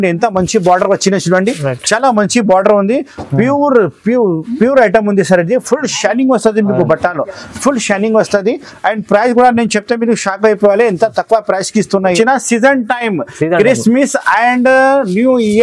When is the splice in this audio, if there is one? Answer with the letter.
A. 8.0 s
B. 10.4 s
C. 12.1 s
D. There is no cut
C